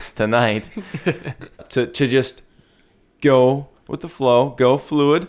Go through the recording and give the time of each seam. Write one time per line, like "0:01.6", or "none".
0:01.6